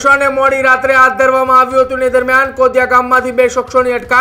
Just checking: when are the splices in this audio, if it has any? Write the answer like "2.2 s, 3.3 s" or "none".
none